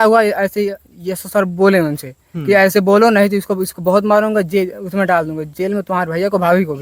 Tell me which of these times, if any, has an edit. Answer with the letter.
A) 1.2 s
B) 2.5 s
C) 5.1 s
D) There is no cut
D